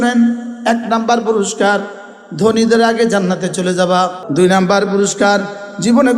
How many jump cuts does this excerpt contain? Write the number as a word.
one